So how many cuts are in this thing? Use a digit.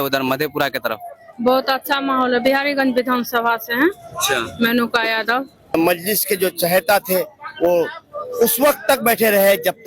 1